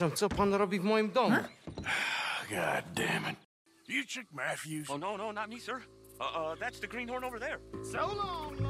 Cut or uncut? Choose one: cut